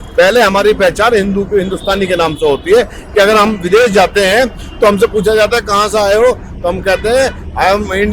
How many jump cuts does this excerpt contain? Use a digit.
0